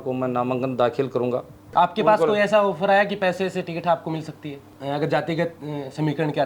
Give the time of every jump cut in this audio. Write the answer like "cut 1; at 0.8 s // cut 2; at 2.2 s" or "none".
cut 1; at 1.7 s // cut 2; at 4.7 s

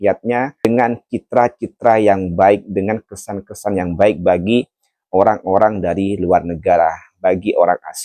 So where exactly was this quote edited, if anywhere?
none

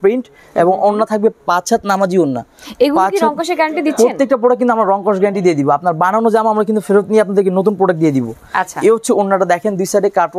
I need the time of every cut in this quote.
none

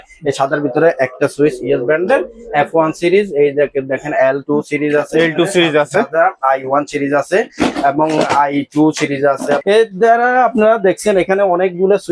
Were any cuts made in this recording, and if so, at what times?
cut 1; at 9.6 s

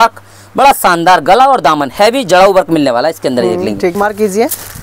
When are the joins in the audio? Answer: cut 1; at 3.9 s

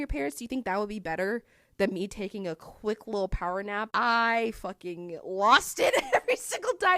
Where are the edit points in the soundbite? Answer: cut 1; at 3.9 s

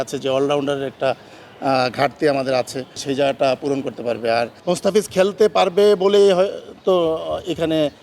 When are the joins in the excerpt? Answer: cut 1; at 3.0 s // cut 2; at 4.6 s

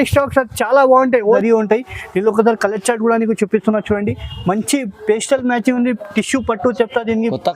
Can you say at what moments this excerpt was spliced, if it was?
cut 1; at 1.4 s

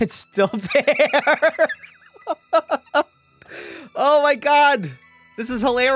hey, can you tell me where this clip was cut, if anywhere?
none

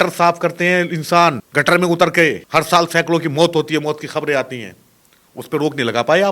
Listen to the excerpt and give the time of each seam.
cut 1; at 1.4 s // cut 2; at 2.4 s

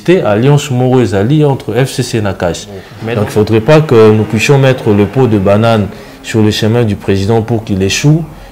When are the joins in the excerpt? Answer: cut 1; at 2.9 s

